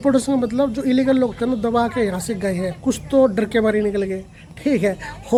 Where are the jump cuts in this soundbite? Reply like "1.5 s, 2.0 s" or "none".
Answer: none